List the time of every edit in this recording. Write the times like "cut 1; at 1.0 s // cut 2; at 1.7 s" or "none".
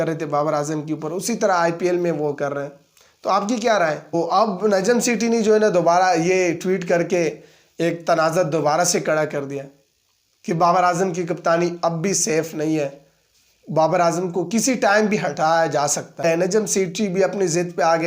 cut 1; at 4.1 s // cut 2; at 16.2 s